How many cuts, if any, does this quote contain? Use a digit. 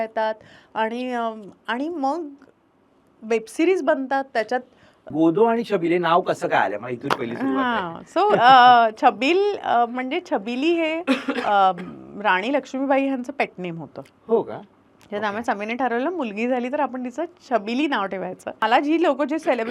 2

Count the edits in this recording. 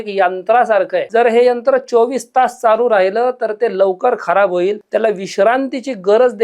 2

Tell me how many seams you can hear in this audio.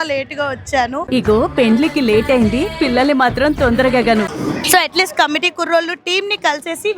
1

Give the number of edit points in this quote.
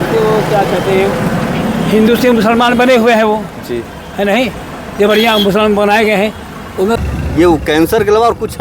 1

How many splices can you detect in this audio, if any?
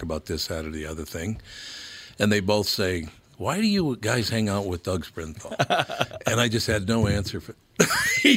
0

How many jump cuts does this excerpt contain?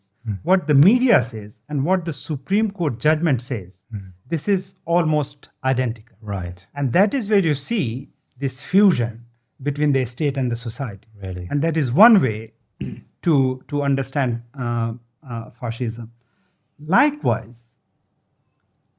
0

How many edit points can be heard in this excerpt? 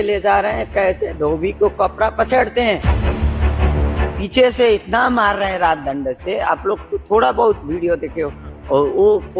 0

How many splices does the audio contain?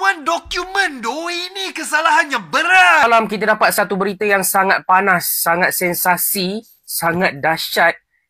1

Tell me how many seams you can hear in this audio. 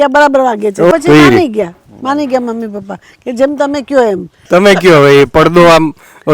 2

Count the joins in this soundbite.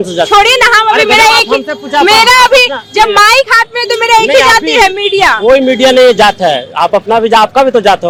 0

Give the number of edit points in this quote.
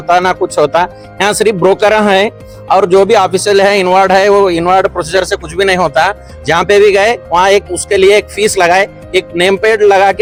0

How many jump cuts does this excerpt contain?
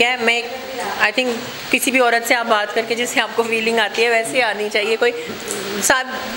1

